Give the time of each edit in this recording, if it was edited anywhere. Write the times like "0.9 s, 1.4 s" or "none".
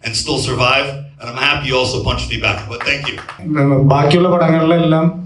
3.4 s

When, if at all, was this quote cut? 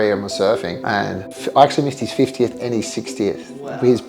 1.2 s

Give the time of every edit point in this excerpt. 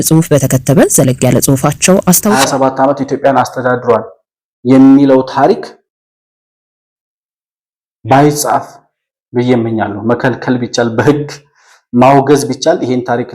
2.4 s

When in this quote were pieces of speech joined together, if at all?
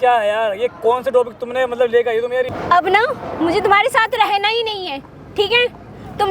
2.5 s

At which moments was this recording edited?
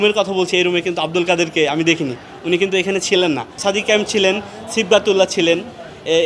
3.6 s

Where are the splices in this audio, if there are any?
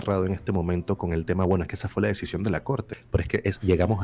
2.9 s

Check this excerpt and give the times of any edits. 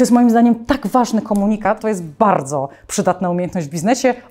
1.7 s

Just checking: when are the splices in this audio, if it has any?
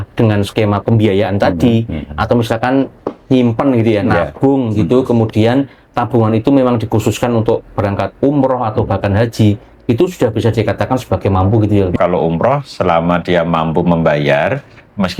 11.9 s

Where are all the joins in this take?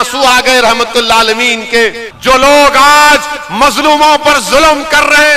2.1 s

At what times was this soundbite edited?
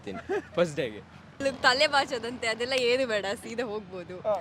1.4 s

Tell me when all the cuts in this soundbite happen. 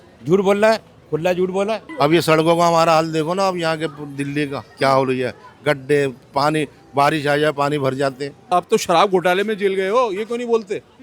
1.8 s, 8.4 s

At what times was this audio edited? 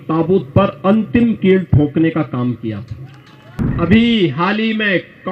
3.6 s

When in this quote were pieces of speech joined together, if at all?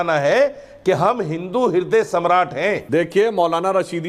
2.8 s

